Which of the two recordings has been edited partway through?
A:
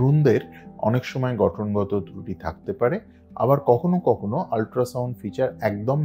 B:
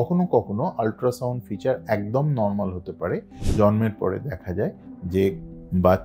B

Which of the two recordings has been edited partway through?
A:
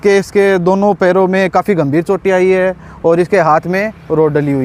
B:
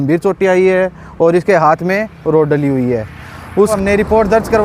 B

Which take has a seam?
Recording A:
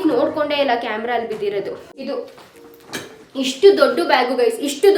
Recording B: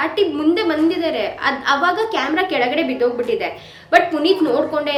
A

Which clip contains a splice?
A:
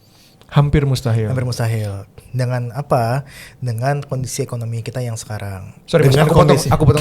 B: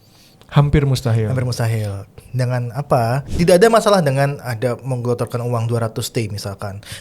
B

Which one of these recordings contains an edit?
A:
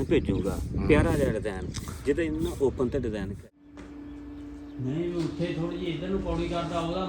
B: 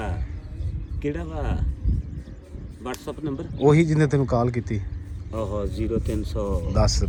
A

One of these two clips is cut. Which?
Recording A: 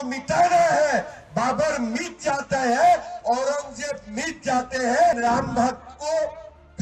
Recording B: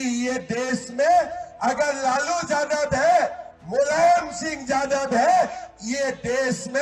A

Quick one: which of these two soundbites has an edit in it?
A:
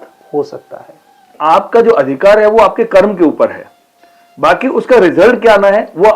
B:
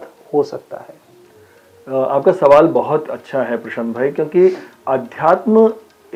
A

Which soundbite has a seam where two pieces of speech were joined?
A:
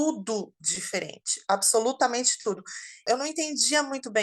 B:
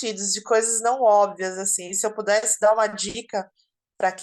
A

